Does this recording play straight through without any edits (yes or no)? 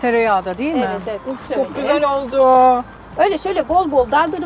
no